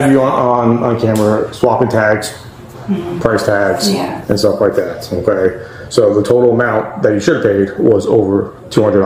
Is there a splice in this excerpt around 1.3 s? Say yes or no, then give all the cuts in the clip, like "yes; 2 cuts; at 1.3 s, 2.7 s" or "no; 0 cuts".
no; 0 cuts